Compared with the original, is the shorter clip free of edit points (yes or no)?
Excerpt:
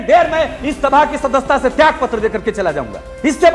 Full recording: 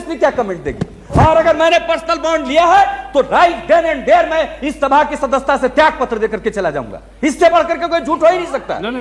yes